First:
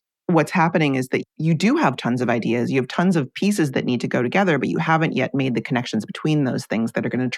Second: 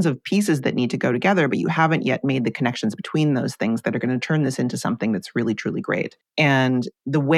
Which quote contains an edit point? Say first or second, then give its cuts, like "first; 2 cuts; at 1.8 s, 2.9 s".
second; 1 cut; at 6.2 s